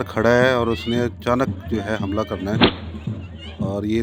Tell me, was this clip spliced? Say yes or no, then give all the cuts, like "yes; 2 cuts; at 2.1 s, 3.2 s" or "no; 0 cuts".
no; 0 cuts